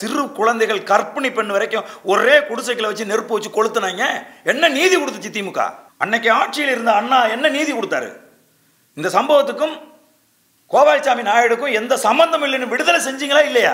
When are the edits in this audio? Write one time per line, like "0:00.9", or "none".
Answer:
0:05.9